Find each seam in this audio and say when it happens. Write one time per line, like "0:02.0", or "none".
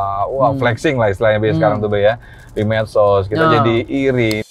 none